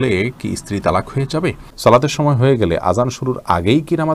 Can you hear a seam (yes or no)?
yes